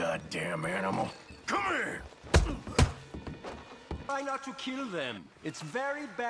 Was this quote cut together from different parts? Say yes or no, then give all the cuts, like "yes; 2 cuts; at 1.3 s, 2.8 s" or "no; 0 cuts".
yes; 1 cut; at 4.1 s